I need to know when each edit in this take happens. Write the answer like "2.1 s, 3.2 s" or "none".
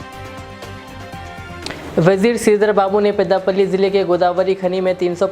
1.6 s